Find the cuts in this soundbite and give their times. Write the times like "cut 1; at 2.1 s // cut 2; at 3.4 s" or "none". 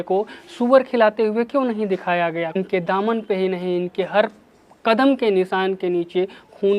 cut 1; at 2.6 s